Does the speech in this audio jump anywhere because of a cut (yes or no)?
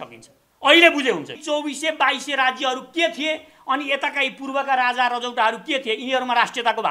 yes